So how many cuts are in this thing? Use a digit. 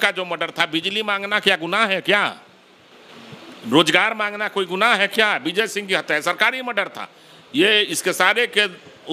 0